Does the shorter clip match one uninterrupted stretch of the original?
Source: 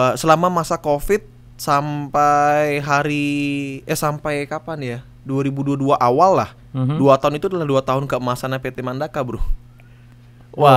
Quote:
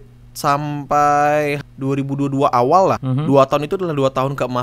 no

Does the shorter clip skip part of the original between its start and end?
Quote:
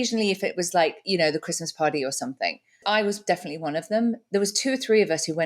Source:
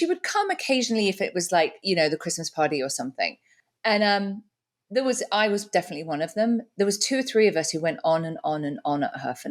yes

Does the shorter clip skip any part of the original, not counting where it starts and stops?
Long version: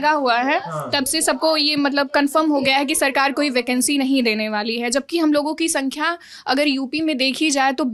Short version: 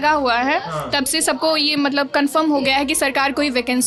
no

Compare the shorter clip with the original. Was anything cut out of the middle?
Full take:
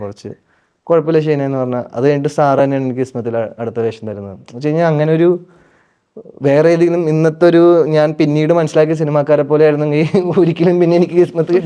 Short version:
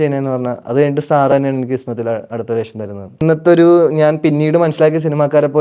yes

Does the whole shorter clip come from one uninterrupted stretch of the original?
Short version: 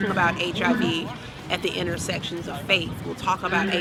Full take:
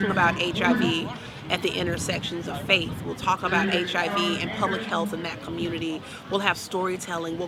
yes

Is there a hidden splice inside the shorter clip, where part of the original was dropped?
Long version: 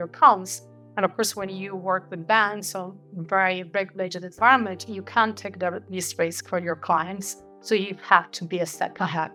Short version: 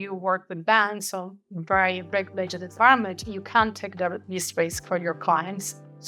no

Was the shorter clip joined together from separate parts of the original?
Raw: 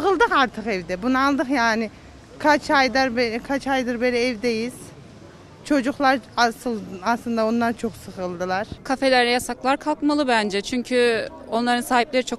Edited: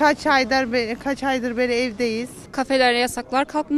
yes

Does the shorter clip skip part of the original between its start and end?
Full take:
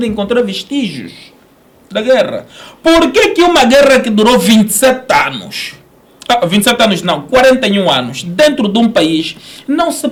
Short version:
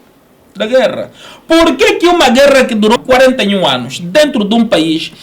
yes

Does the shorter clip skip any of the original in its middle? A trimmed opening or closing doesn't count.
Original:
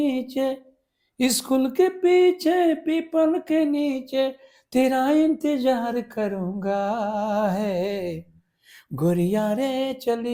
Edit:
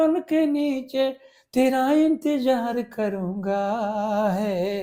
no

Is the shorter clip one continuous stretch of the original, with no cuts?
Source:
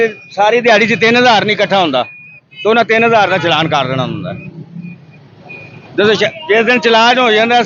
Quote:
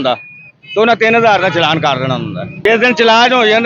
no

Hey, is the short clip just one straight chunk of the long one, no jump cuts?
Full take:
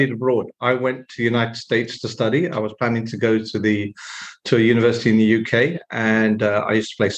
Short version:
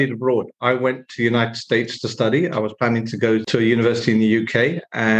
no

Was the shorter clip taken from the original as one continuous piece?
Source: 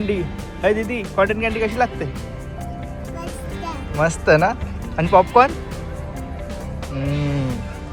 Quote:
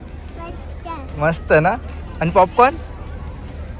yes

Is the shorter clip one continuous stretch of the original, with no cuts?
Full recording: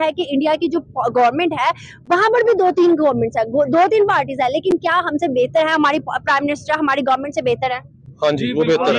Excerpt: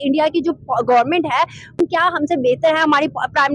no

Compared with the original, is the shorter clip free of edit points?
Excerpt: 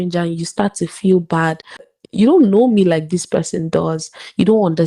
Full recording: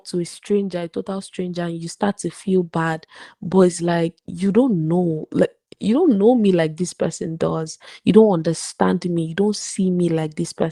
no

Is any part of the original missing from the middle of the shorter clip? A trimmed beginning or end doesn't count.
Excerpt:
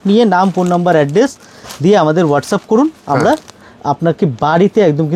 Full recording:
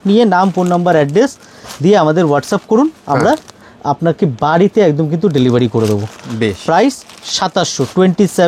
no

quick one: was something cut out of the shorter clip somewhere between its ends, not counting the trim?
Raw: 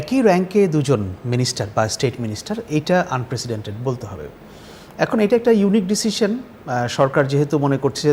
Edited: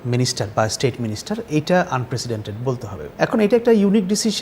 yes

